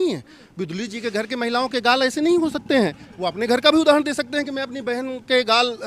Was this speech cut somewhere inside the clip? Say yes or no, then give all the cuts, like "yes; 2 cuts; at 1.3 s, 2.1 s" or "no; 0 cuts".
no; 0 cuts